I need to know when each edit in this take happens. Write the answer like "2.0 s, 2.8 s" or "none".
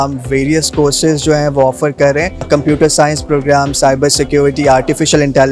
2.5 s

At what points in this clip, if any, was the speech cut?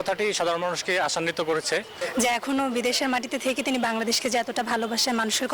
2.0 s

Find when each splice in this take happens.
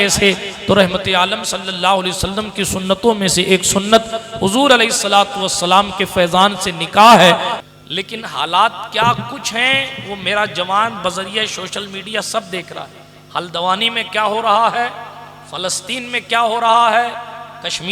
7.5 s

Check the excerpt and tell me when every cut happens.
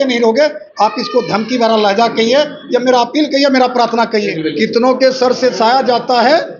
4.4 s

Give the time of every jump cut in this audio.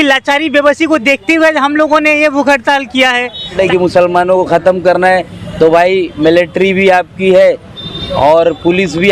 3.6 s

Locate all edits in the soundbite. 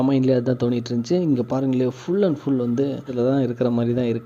3.1 s

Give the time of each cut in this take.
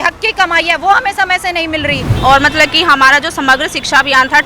2.1 s

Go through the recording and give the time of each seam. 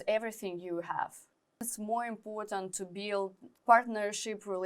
1.7 s, 3.4 s

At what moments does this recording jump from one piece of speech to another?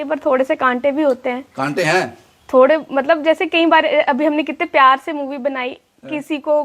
none

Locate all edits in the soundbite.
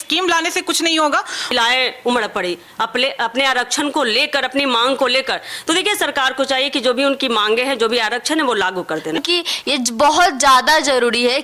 1.5 s, 9.2 s

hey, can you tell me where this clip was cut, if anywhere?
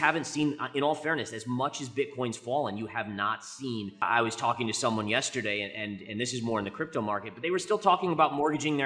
4.0 s

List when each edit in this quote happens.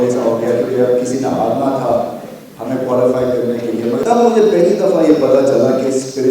4.0 s

